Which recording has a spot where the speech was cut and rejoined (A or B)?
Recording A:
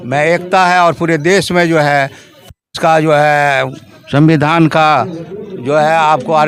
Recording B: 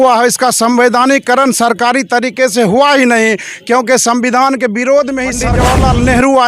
B